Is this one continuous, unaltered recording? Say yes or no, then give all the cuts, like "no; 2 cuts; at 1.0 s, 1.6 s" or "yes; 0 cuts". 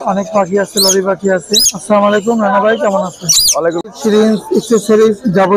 no; 1 cut; at 3.8 s